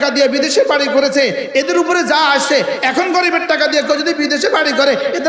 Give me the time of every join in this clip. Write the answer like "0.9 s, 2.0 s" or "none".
none